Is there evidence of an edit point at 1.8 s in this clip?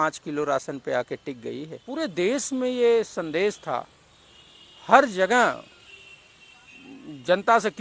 yes; 1 cut; at 1.8 s

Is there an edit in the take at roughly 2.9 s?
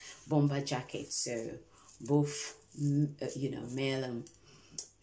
no; 0 cuts

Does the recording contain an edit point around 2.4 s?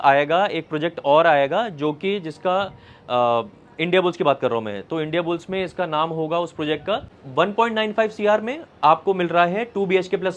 no; 1 cut; at 7.2 s

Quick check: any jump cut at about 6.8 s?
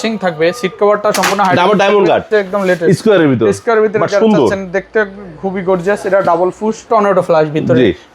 yes; 2 cuts; at 2.2 s, 6.8 s

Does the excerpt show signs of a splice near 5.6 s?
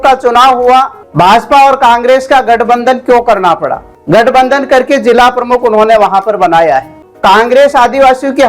no; 3 cuts; at 1.0 s, 3.9 s, 7.0 s

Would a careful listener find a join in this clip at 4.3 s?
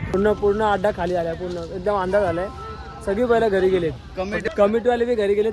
yes; 1 cut; at 4.3 s

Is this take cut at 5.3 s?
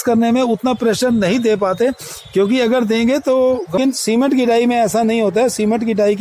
no; 1 cut; at 3.8 s

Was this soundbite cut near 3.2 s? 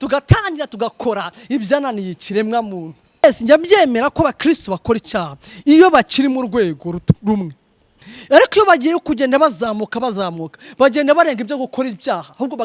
yes; 1 cut; at 3.2 s

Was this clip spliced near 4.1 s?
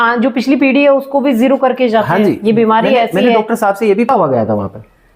yes; 1 cut; at 4.1 s

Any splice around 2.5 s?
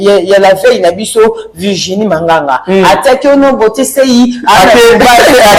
no; 0 cuts

